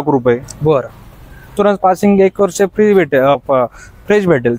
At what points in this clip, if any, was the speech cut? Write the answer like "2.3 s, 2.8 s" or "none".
1.5 s